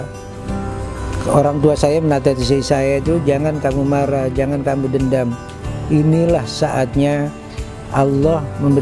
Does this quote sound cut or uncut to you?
uncut